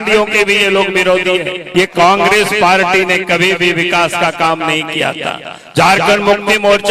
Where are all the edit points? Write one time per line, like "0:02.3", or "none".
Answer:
0:01.6